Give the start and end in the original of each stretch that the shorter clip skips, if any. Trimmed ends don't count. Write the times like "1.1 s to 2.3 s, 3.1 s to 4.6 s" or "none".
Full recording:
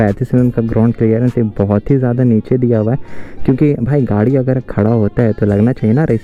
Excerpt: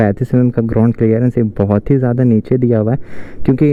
none